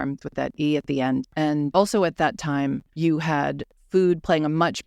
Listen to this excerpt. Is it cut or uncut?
cut